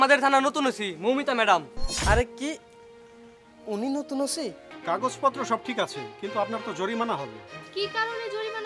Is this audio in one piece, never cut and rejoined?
no; 2 cuts; at 1.8 s, 4.7 s

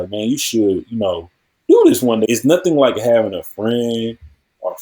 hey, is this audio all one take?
no; 1 cut; at 2.3 s

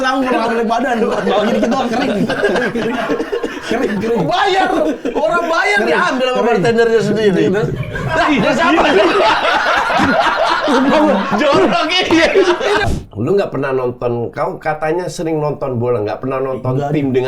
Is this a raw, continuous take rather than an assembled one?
no; 1 cut; at 12.8 s

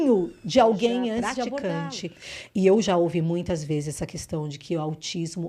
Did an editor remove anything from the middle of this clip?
yes; 1 cut; at 1.6 s

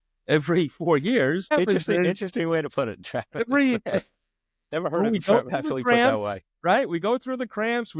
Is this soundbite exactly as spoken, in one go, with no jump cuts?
no; 1 cut; at 1.5 s

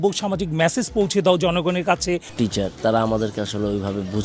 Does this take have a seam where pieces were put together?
yes; 1 cut; at 2.3 s

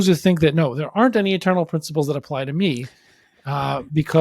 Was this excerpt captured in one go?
yes; 0 cuts

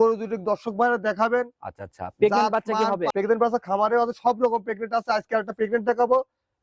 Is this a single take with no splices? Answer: no; 1 cut; at 3.1 s

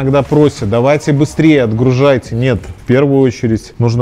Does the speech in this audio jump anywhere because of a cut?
no; 0 cuts

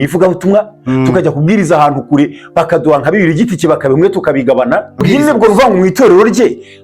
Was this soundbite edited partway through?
yes; 1 cut; at 5.0 s

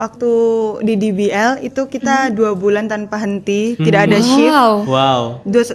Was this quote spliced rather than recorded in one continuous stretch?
no; 0 cuts

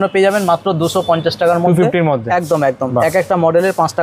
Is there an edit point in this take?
no; 0 cuts

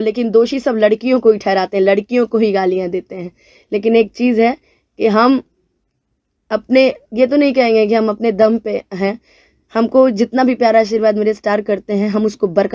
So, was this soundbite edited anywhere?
no; 0 cuts

